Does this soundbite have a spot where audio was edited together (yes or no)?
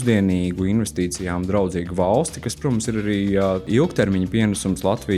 yes